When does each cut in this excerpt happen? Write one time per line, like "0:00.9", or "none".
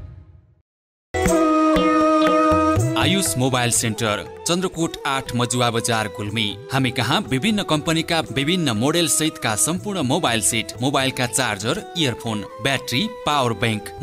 0:01.0